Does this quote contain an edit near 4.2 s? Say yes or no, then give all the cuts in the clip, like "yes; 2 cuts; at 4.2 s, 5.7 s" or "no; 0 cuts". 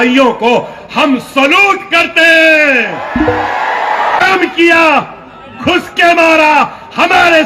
yes; 1 cut; at 4.2 s